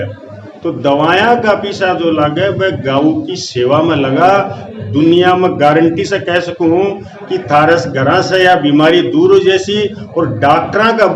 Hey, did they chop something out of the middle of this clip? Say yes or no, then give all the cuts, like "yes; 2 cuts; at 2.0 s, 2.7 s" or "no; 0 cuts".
no; 0 cuts